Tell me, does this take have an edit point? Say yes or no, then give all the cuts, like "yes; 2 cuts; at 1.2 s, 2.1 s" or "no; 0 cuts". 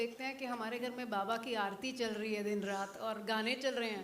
no; 0 cuts